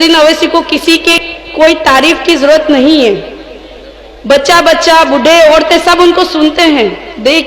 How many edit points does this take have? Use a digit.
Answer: 1